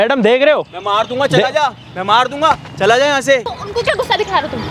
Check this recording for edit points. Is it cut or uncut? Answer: cut